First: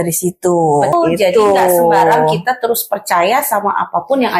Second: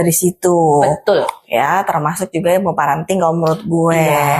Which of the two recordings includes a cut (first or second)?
first